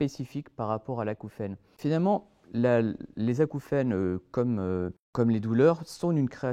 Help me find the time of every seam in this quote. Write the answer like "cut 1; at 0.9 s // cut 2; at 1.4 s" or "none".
cut 1; at 1.7 s // cut 2; at 5.0 s